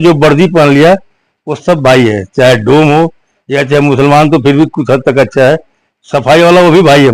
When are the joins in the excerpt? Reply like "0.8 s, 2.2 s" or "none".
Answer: none